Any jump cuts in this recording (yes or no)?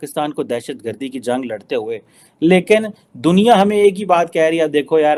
no